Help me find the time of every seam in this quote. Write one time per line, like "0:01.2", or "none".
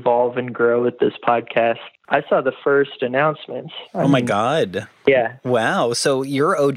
0:01.9

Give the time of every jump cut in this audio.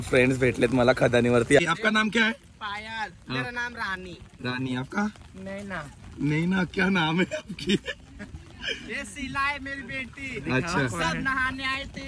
0:01.6

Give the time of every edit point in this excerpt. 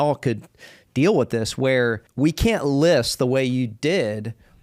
0:02.0

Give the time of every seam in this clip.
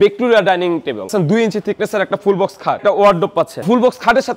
0:01.1
0:02.8
0:03.6

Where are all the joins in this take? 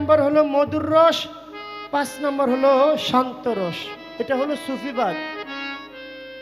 none

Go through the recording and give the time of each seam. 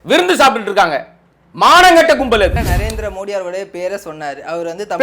0:02.5

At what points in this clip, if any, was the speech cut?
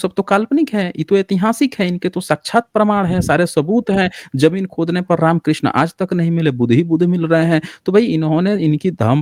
none

